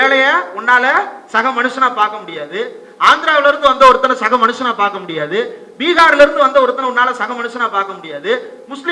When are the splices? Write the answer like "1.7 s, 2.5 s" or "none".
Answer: none